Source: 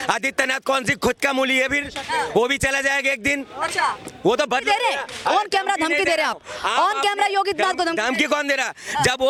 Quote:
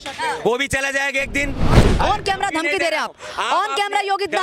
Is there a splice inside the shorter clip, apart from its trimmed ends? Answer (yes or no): yes